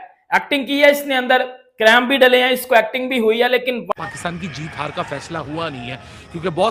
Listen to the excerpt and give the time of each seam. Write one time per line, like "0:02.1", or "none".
none